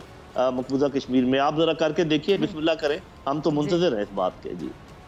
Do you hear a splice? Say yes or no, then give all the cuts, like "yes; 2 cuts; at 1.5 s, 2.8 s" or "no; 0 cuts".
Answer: no; 0 cuts